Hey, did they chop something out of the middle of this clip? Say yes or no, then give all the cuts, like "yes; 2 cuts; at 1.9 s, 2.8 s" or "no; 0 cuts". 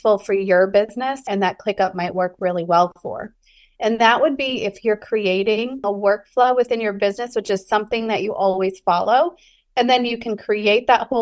yes; 2 cuts; at 1.3 s, 5.8 s